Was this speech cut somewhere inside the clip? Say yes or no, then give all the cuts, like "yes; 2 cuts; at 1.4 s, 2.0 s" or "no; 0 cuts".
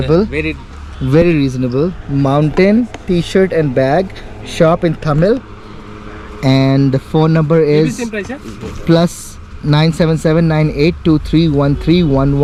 no; 0 cuts